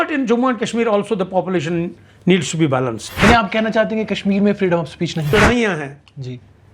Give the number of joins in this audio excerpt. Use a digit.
2